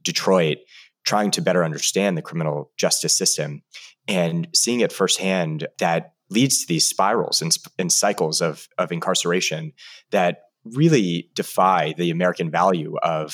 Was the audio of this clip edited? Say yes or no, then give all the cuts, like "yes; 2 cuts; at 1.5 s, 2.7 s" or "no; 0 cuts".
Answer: yes; 1 cut; at 5.6 s